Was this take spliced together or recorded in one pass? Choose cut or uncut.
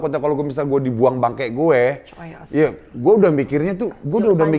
uncut